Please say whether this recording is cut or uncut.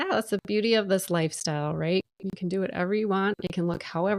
uncut